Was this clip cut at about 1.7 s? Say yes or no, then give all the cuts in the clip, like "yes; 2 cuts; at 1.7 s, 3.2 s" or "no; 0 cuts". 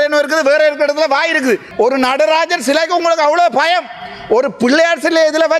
yes; 1 cut; at 1.7 s